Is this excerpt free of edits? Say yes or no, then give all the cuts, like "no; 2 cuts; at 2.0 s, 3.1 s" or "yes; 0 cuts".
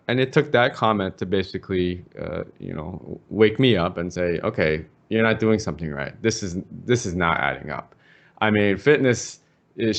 yes; 0 cuts